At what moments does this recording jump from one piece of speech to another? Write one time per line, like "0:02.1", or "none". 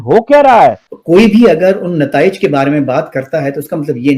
0:00.9